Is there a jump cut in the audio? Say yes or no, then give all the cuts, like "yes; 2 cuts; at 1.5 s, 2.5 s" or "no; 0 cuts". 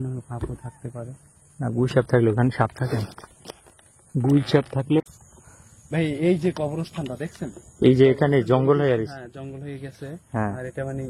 yes; 1 cut; at 5.0 s